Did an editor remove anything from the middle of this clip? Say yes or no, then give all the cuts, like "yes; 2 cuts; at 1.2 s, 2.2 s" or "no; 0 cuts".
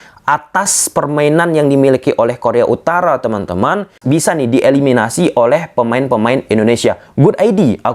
yes; 1 cut; at 4.0 s